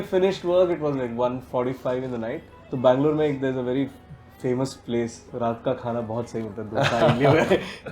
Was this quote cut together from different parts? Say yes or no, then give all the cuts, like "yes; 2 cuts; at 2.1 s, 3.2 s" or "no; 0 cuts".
yes; 1 cut; at 2.5 s